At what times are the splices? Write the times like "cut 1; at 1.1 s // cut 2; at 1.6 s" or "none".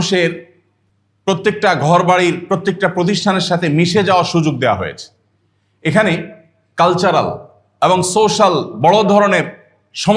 cut 1; at 1.4 s